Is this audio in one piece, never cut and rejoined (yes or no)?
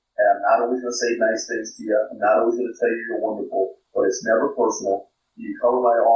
yes